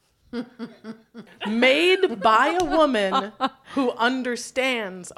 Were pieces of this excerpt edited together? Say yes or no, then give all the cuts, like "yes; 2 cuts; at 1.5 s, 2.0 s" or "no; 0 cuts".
yes; 1 cut; at 1.3 s